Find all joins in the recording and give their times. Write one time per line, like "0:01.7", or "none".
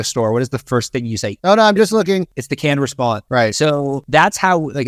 0:01.3
0:02.7
0:04.0